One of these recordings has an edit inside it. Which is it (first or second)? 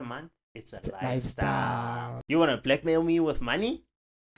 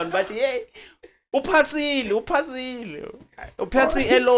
first